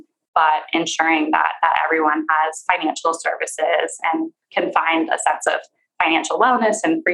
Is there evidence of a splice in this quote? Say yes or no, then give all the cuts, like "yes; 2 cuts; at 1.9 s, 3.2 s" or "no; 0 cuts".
no; 0 cuts